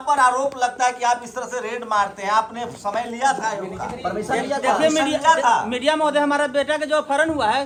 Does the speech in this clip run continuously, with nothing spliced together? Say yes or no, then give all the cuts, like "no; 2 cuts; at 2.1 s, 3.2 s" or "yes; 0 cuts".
yes; 0 cuts